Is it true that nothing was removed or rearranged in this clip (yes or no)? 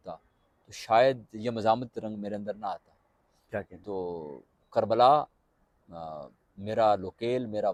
yes